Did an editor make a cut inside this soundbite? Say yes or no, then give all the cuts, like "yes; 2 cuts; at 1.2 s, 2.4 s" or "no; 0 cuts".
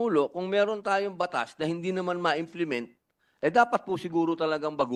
no; 0 cuts